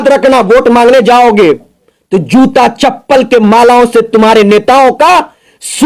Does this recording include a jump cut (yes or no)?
no